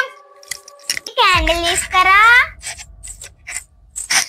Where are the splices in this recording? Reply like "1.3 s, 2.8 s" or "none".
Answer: 1.1 s